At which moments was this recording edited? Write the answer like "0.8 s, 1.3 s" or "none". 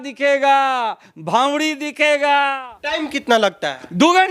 2.7 s